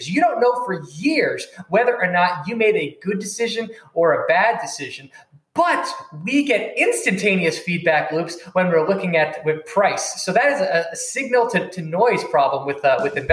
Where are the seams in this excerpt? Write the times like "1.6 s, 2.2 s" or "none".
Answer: none